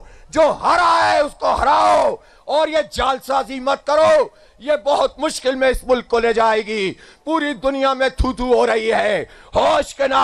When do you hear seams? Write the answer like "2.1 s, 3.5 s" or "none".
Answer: none

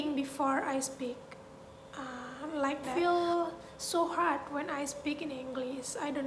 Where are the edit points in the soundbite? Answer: 2.9 s

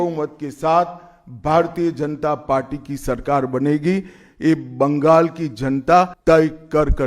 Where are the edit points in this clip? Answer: 6.1 s

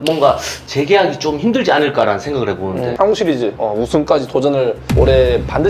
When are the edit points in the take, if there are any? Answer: 2.9 s

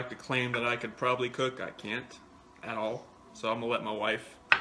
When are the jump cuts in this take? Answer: none

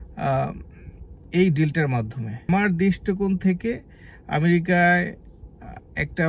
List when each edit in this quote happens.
2.5 s

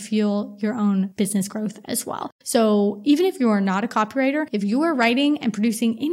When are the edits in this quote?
1.1 s, 2.3 s, 4.5 s

